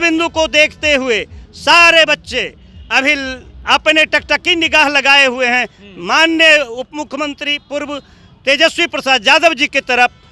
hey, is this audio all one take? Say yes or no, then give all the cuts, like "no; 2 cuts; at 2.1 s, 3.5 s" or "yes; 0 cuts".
yes; 0 cuts